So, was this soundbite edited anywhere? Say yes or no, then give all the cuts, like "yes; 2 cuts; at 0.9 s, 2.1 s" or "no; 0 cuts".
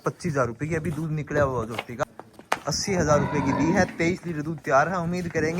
yes; 1 cut; at 2.0 s